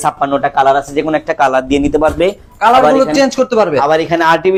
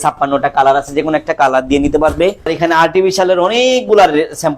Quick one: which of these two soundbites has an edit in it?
second; 1 cut; at 2.5 s

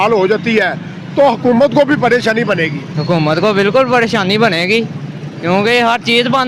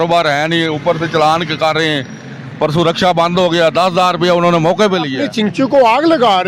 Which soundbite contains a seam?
second; 1 cut; at 5.2 s

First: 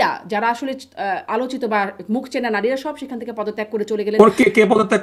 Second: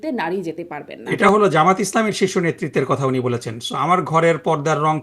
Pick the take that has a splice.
second; 1 cut; at 1.1 s

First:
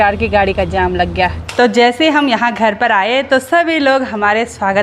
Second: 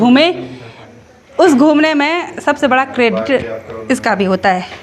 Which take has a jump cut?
first; 1 cut; at 1.4 s

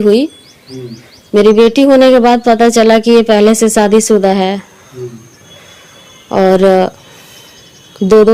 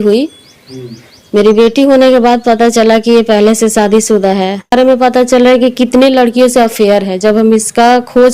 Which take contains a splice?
second; 1 cut; at 4.7 s

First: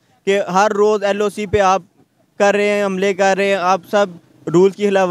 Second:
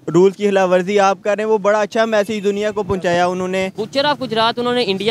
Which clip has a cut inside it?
second; 1 cut; at 3.8 s

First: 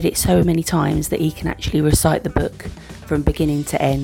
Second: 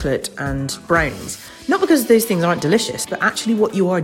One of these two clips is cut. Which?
second; 1 cut; at 3.0 s

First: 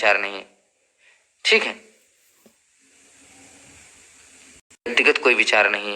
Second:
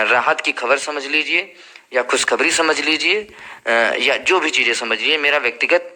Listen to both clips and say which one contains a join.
first; 1 cut; at 4.9 s

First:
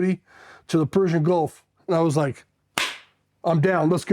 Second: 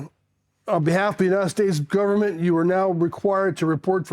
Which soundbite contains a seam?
first; 1 cut; at 1.7 s

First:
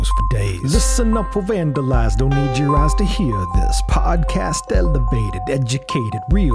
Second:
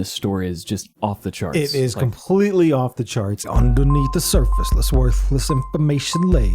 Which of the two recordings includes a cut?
second; 1 cut; at 3.4 s

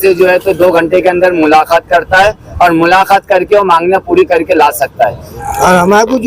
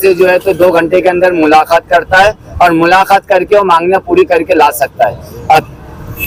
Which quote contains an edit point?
first; 1 cut; at 5.3 s

